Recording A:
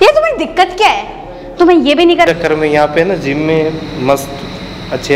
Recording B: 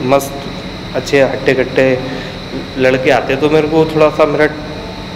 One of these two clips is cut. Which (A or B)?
A